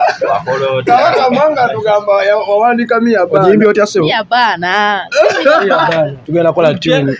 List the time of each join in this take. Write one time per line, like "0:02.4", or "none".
0:06.2